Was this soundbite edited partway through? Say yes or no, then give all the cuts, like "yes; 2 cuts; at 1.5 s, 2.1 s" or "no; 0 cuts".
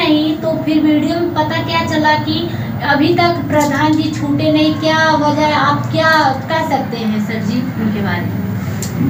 no; 0 cuts